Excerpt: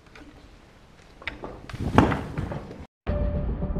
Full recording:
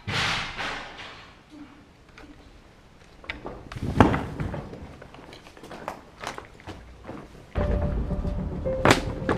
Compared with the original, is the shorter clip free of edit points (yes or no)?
no